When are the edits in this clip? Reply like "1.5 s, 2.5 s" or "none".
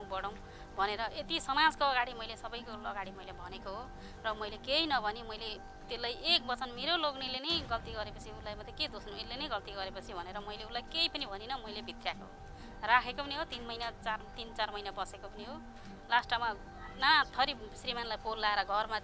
none